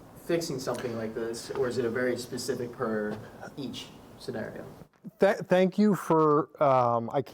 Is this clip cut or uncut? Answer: uncut